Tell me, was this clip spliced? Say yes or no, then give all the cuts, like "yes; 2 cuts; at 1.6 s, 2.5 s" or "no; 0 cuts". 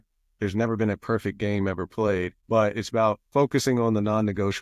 yes; 1 cut; at 3.2 s